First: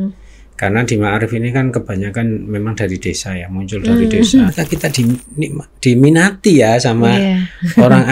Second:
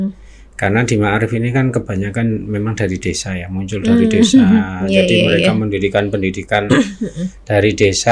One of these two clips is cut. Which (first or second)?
first